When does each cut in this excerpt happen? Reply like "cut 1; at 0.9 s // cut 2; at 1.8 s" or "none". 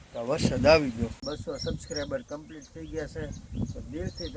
cut 1; at 1.2 s

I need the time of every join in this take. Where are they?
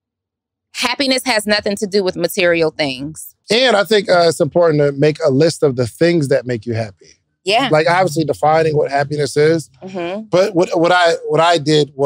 cut 1; at 3.3 s

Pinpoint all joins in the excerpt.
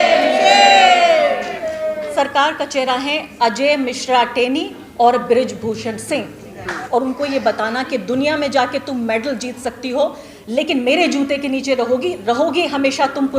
cut 1; at 2.1 s // cut 2; at 6.8 s

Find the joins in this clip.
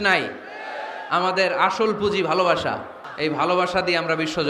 cut 1; at 3.0 s

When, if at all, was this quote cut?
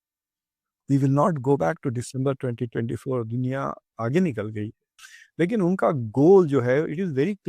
cut 1; at 4.8 s

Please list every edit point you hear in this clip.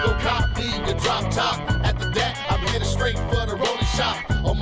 none

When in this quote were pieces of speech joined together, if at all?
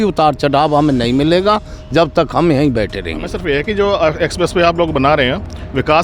cut 1; at 3.3 s

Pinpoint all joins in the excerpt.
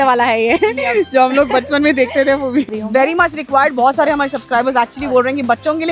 cut 1; at 2.6 s

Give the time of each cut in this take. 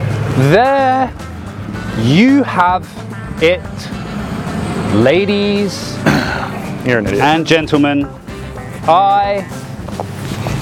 none

